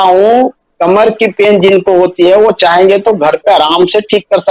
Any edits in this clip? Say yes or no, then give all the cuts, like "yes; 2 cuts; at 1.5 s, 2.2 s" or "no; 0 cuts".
no; 0 cuts